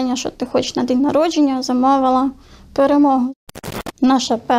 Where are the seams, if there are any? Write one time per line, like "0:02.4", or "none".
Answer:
0:03.4